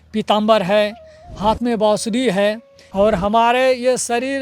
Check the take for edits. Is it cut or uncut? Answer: cut